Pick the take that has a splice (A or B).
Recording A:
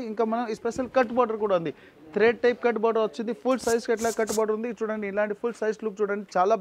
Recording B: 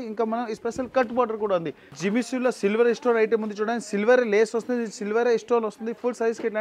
B